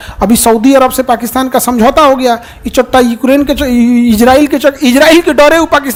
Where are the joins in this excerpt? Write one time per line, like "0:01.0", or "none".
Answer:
none